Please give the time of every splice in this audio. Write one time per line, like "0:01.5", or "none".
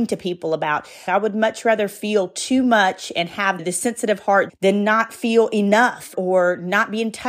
0:01.0
0:06.1